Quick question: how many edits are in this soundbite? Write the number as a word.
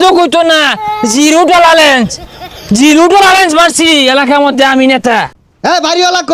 one